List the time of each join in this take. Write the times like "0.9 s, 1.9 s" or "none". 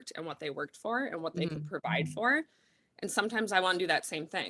none